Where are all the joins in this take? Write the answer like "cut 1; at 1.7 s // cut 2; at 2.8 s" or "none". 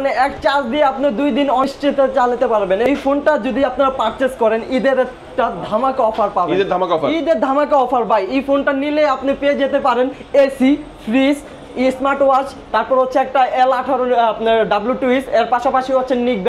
cut 1; at 1.6 s // cut 2; at 2.9 s